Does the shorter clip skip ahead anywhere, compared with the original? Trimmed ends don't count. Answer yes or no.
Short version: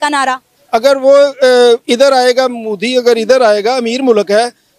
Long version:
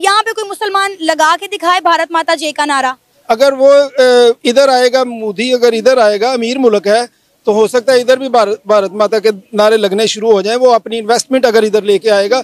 no